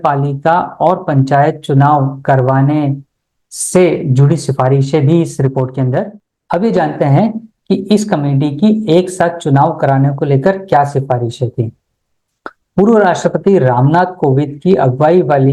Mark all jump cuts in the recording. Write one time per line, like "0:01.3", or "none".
0:06.1